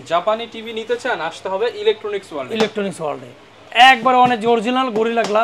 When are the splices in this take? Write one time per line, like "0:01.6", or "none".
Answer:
none